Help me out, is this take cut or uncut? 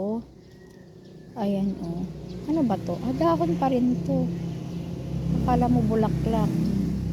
uncut